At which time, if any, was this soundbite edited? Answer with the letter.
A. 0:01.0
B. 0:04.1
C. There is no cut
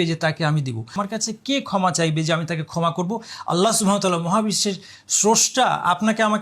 A